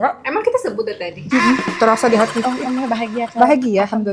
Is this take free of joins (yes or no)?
no